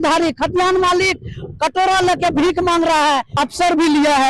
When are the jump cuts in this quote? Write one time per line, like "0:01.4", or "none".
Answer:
0:03.3